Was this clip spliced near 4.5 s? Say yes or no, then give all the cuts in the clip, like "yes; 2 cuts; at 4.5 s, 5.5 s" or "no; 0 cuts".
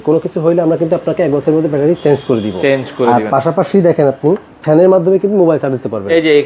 yes; 1 cut; at 4.5 s